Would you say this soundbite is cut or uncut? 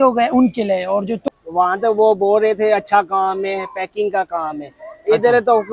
cut